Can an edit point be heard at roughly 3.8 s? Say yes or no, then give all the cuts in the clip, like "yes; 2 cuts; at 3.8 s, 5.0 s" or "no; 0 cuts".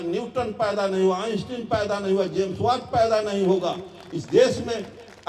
no; 0 cuts